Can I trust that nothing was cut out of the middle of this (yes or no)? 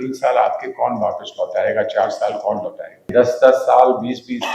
no